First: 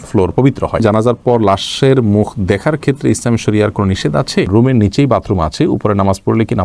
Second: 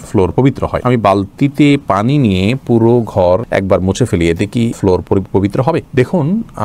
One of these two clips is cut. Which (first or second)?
first